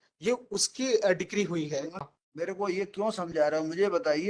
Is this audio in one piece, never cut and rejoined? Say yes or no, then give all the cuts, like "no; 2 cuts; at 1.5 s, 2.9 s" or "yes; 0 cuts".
no; 1 cut; at 2.0 s